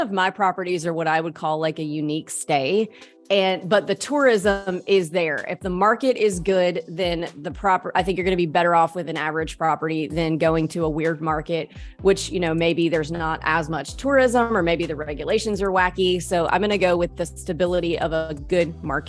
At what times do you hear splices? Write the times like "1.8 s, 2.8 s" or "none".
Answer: none